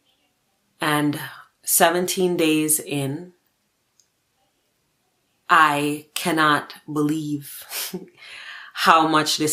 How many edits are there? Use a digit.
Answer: 0